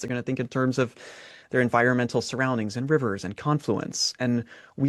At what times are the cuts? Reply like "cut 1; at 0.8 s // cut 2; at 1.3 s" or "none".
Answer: none